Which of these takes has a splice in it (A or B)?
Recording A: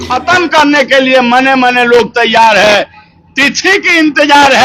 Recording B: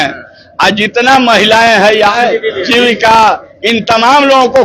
B